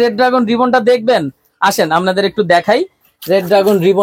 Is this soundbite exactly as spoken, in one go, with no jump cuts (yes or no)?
yes